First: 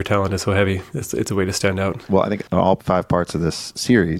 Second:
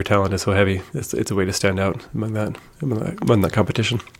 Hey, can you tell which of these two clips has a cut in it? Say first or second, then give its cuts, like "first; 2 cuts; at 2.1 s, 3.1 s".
first; 1 cut; at 2.0 s